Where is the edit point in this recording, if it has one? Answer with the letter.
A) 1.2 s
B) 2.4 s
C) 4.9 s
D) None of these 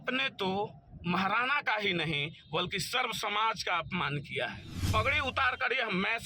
C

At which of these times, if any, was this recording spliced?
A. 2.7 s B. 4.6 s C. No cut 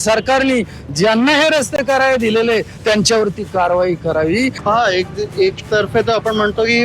B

